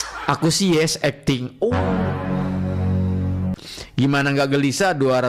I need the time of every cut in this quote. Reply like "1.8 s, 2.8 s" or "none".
none